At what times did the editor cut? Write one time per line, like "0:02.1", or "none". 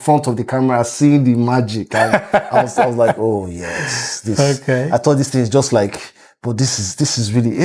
none